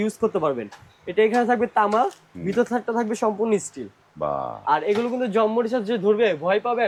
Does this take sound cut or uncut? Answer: uncut